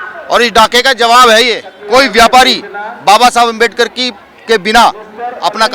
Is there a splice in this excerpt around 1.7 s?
yes; 1 cut; at 1.7 s

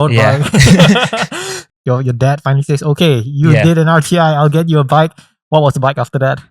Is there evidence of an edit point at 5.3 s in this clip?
no; 1 cut; at 1.7 s

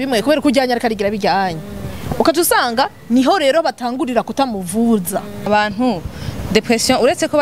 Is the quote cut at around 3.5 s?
no; 1 cut; at 5.5 s

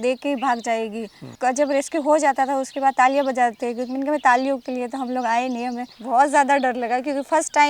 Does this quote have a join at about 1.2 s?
yes; 2 cuts; at 1.2 s, 5.9 s

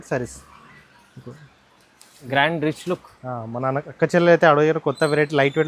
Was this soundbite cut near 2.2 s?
yes; 1 cut; at 2.2 s

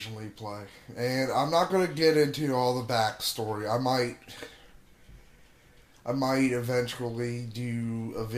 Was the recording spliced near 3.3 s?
no; 1 cut; at 7.2 s

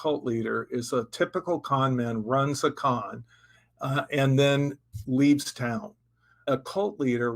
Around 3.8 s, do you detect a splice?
no; 1 cut; at 6.4 s

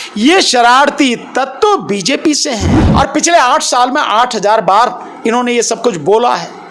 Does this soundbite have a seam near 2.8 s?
yes; 1 cut; at 2.8 s

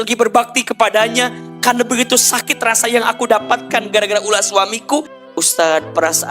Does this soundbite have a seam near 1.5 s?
no; 1 cut; at 5.1 s

